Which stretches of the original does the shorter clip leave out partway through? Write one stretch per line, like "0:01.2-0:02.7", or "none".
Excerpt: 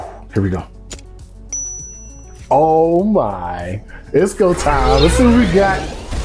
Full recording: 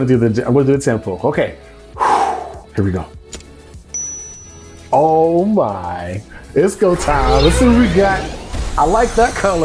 none